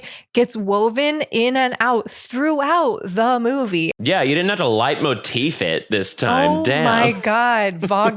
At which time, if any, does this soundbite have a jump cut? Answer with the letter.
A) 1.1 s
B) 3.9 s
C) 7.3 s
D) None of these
B